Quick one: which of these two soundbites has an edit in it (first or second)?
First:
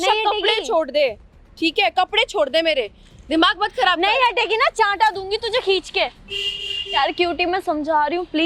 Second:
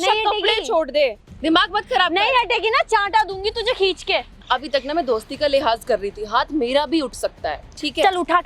second